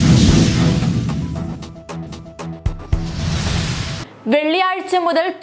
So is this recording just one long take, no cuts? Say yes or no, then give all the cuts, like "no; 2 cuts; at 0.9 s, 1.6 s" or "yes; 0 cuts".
yes; 0 cuts